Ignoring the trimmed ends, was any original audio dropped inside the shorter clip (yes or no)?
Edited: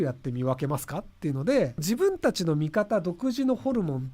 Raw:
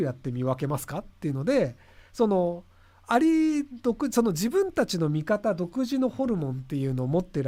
yes